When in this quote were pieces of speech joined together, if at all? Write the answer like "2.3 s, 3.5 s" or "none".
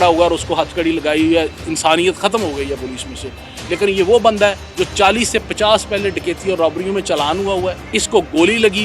4.7 s, 7.9 s